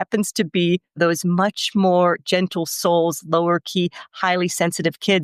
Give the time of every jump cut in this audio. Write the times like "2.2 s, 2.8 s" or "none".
2.2 s